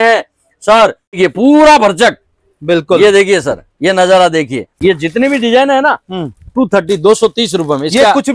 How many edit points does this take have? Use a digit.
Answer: 2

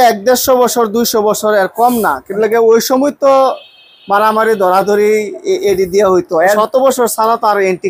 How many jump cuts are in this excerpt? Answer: 1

